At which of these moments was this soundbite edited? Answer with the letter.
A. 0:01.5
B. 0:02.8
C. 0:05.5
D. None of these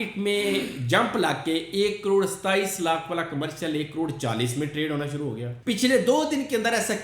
C